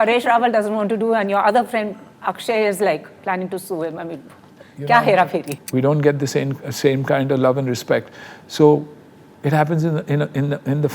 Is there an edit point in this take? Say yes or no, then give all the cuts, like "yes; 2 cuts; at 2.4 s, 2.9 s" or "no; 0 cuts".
yes; 1 cut; at 5.6 s